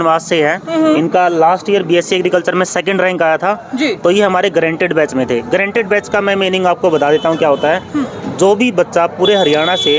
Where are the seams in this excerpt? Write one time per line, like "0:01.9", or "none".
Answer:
none